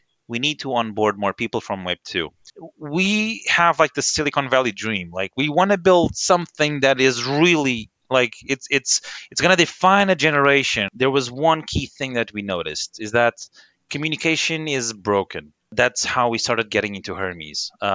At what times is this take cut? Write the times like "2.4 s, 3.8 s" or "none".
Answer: 2.5 s, 10.8 s